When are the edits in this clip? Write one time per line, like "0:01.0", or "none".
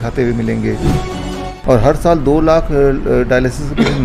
0:01.2